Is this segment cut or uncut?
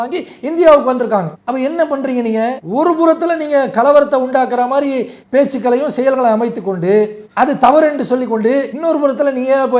cut